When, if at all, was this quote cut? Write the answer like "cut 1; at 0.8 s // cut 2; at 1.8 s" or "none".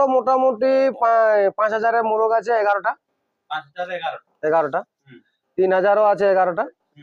none